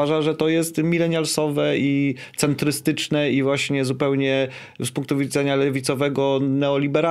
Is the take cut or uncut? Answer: uncut